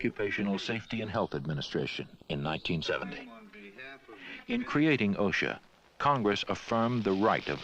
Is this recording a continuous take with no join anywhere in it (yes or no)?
no